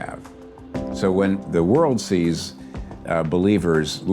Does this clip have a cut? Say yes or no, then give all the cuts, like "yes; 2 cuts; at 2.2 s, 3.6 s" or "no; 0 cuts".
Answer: yes; 1 cut; at 1.4 s